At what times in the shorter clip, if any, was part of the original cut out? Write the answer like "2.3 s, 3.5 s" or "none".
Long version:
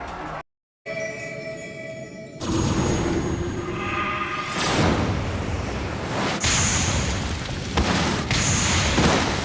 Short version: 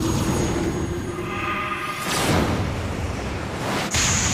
none